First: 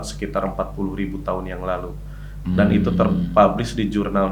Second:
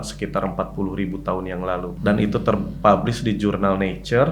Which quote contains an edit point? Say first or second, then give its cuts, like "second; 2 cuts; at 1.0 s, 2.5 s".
second; 1 cut; at 2.0 s